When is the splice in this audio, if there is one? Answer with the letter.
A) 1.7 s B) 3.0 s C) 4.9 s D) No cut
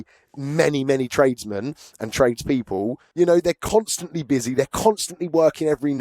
B